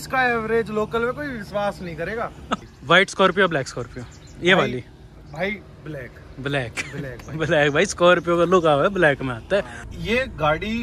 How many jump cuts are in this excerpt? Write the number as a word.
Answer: two